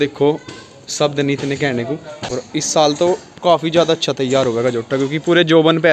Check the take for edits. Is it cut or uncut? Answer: cut